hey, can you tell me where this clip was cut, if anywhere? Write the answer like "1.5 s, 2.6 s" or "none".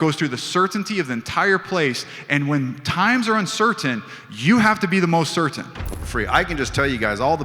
6.0 s